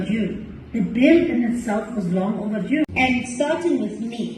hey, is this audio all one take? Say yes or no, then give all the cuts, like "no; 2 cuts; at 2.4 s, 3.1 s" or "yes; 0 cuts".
no; 1 cut; at 2.9 s